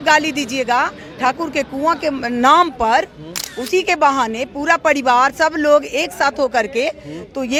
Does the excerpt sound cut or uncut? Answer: uncut